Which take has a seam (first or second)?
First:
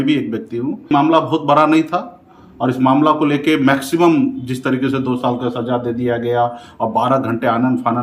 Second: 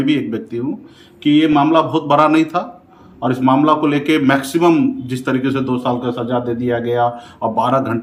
first